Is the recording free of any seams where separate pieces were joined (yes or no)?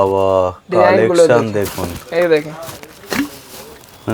yes